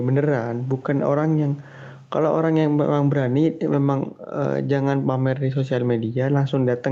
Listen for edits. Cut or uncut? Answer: uncut